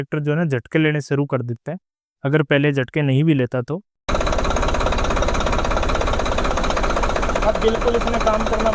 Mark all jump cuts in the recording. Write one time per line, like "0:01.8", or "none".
0:04.1